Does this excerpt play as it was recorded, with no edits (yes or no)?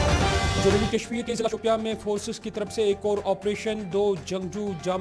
no